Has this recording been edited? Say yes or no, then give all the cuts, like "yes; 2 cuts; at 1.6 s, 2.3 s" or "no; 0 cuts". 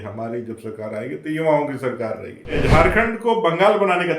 yes; 1 cut; at 2.6 s